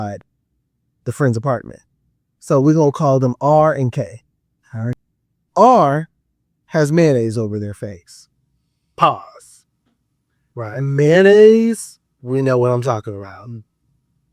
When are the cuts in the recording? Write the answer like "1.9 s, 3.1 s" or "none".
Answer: 5.0 s